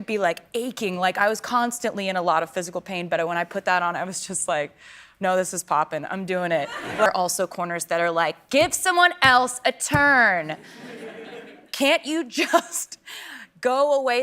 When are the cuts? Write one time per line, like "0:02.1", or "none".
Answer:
0:07.1